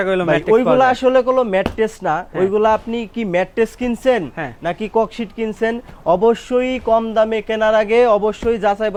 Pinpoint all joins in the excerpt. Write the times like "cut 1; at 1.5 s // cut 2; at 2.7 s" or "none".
none